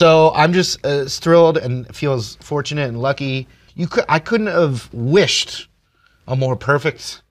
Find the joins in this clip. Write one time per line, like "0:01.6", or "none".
0:03.6